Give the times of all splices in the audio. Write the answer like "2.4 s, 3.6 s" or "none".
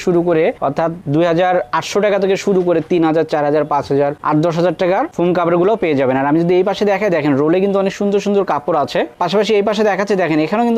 none

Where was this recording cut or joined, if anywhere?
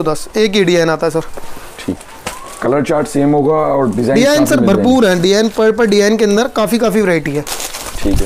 none

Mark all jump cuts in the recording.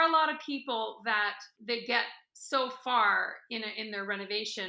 none

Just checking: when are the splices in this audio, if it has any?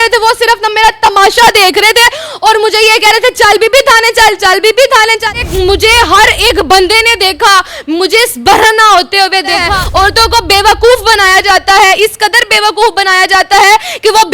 5.3 s, 9.7 s

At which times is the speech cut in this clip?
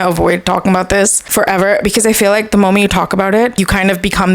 1.2 s, 3.6 s

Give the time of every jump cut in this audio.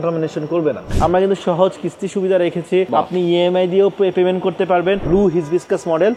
0.9 s, 2.9 s, 5.0 s

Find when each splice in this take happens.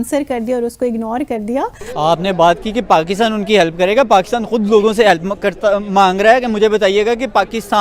1.8 s

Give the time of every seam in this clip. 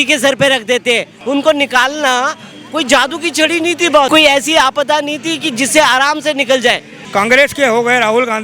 1.1 s, 4.1 s, 6.9 s

